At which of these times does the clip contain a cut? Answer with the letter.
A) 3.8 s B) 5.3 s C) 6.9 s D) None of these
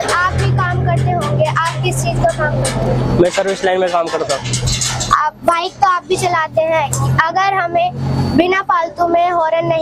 D